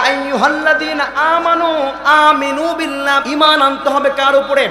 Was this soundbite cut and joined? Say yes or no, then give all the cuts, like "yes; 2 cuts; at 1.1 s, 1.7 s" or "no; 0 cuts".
yes; 1 cut; at 3.2 s